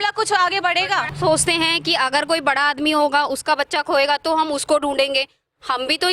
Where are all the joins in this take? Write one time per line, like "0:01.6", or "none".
0:01.1